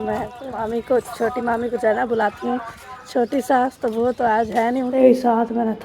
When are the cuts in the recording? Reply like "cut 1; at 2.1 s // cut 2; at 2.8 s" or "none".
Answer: cut 1; at 1.0 s // cut 2; at 4.9 s